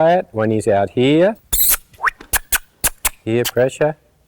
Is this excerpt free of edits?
no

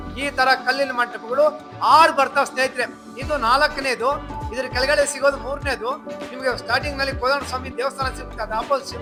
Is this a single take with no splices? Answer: yes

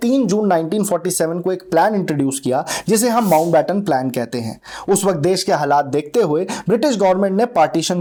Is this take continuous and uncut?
yes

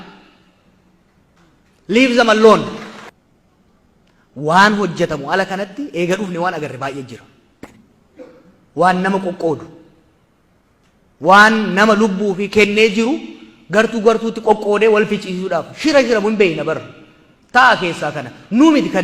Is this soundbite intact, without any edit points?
no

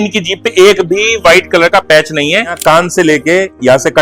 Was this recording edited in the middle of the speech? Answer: yes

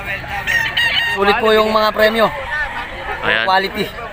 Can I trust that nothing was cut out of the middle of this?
no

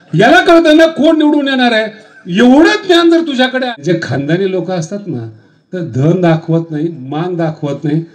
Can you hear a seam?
yes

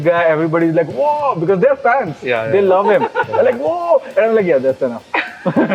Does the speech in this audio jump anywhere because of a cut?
no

